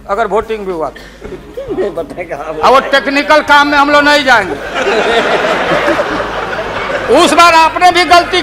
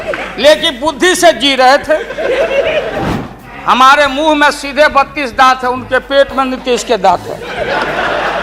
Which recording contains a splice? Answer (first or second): second